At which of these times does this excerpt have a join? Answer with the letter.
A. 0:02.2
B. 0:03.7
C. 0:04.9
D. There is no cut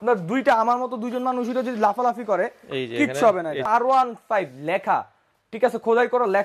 B